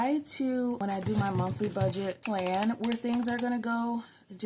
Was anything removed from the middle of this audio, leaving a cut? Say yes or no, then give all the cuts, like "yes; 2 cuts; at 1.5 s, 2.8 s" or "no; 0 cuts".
yes; 2 cuts; at 0.8 s, 2.2 s